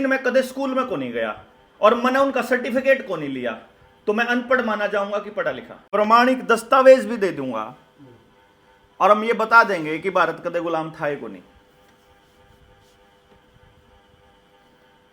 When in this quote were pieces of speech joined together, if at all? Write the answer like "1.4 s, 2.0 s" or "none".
5.8 s